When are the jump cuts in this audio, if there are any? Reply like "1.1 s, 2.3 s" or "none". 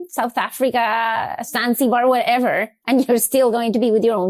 none